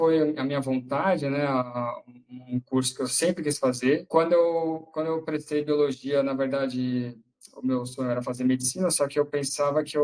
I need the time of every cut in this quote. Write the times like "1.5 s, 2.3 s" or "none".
4.0 s